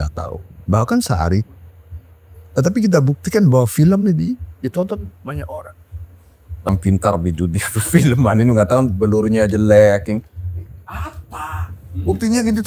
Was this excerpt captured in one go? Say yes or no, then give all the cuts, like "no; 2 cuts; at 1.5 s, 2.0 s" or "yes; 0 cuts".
no; 1 cut; at 6.7 s